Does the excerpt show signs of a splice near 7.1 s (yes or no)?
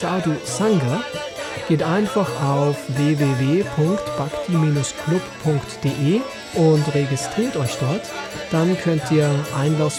no